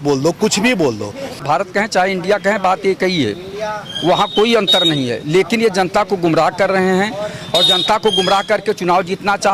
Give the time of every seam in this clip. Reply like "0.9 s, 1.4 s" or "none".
1.4 s